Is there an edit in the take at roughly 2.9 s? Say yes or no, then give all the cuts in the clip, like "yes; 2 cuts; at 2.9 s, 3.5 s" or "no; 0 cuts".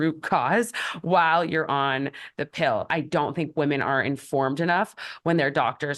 yes; 1 cut; at 2.9 s